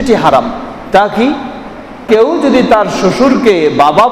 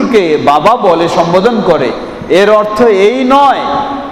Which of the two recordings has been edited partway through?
first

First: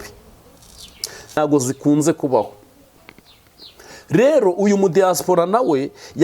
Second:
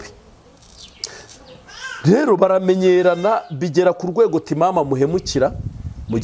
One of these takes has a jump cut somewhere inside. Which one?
first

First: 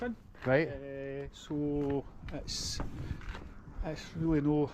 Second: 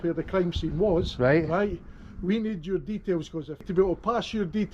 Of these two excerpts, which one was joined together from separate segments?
second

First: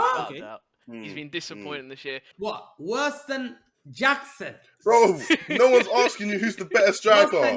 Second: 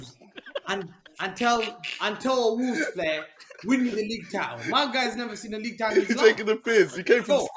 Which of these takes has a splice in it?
first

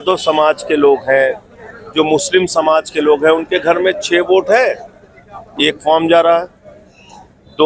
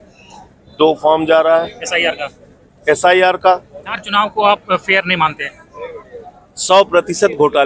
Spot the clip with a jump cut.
second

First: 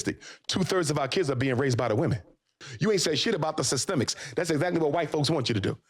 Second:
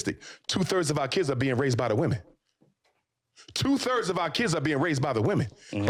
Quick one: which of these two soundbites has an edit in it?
first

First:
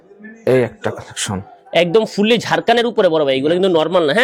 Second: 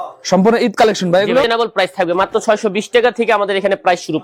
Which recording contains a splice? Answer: second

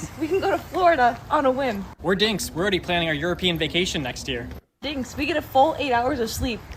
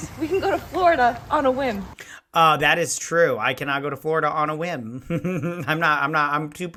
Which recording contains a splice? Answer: first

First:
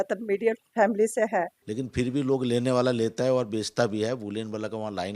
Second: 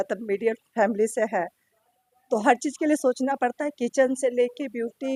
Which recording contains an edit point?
first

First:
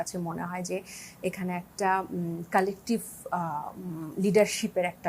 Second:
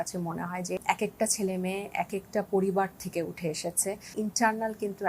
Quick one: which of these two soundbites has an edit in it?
second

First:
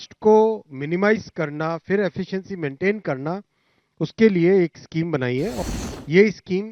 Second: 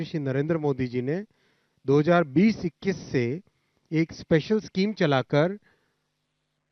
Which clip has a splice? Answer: first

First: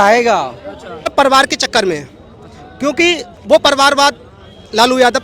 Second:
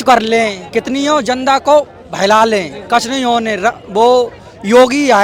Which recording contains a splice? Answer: first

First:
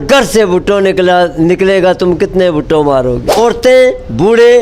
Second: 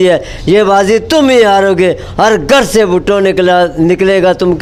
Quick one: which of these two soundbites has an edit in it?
first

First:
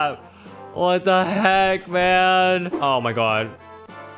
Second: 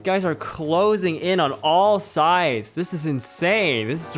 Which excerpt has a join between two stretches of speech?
first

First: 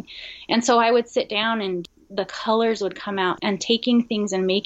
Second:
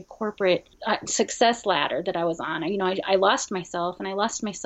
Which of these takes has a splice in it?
first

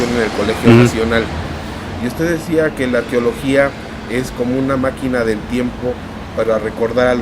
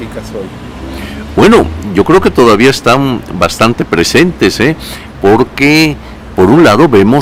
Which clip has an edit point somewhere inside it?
first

